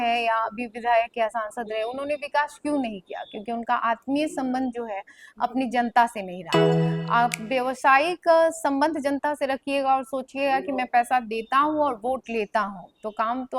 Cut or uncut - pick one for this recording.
uncut